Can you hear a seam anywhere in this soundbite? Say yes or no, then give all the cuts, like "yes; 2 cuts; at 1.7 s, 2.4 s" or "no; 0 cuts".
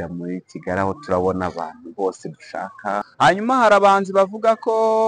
yes; 1 cut; at 3.0 s